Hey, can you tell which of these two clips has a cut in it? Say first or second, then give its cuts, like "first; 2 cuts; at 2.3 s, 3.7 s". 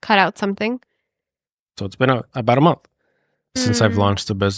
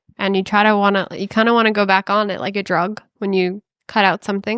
first; 2 cuts; at 1.8 s, 3.6 s